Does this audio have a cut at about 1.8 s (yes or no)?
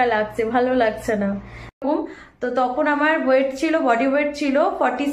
yes